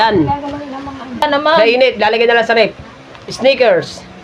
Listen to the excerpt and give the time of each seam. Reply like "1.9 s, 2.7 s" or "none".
1.2 s